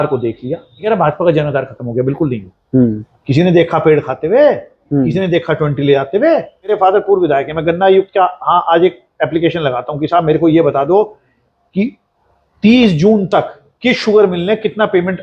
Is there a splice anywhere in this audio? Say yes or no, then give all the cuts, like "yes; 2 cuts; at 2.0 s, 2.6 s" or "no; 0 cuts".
yes; 3 cuts; at 0.8 s, 3.1 s, 6.7 s